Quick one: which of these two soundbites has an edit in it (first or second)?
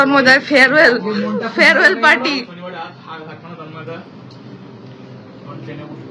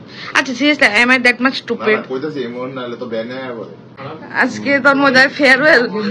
second